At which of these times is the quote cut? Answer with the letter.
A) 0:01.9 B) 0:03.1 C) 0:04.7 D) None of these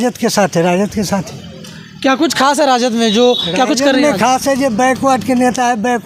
D